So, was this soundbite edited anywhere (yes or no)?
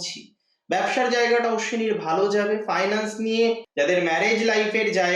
yes